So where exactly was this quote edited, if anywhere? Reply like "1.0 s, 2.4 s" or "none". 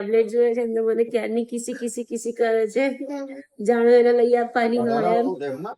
none